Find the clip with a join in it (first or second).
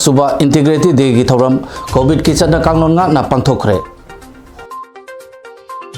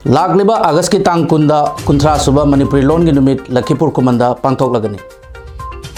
first